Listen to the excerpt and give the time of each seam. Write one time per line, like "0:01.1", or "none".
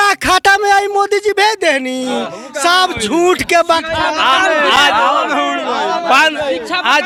none